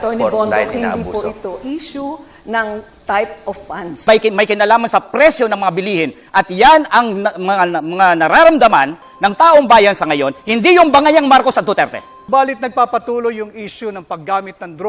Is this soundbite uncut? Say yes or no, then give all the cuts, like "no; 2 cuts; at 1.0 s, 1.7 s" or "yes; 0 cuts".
no; 2 cuts; at 4.0 s, 12.3 s